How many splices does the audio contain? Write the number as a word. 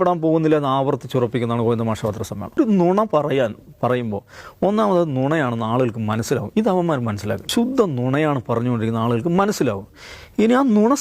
two